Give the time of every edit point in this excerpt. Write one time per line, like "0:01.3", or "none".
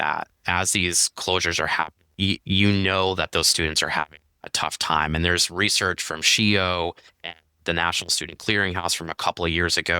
0:02.0